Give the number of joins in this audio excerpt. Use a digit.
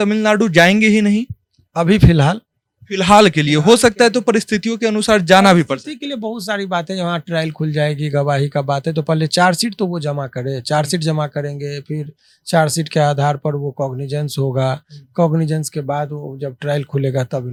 0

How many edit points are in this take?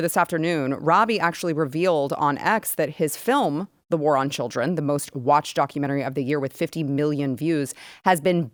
0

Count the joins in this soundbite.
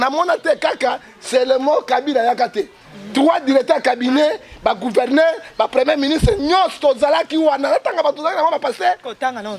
0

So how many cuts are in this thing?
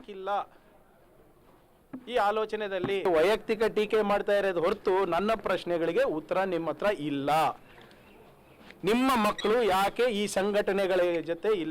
1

